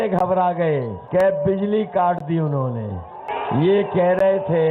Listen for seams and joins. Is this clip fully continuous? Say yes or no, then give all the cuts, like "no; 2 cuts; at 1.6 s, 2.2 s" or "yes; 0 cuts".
no; 2 cuts; at 1.0 s, 3.3 s